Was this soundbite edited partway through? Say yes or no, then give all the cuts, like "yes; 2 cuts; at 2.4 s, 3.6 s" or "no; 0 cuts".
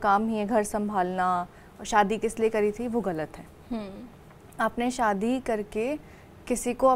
no; 0 cuts